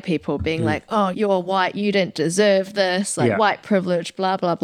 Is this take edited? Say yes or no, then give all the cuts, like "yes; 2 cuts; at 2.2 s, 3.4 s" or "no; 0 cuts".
yes; 1 cut; at 1.1 s